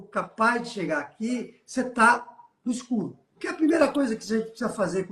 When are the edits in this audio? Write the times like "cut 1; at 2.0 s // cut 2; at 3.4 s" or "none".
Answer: cut 1; at 3.4 s

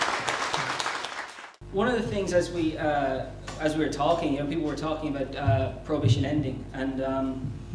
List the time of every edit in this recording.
cut 1; at 4.8 s

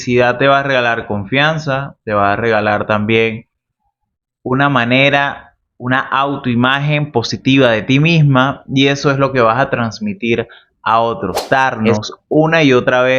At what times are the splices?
cut 1; at 11.4 s

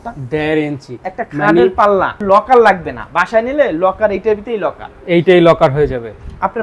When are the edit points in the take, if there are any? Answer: none

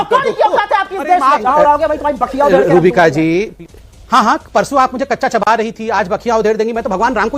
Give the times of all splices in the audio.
cut 1; at 1.5 s

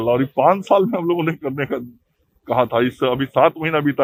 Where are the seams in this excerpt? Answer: none

